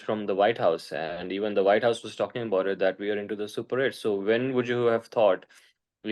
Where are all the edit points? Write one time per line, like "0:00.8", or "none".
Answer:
none